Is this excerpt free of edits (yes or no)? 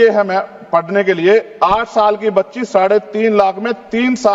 yes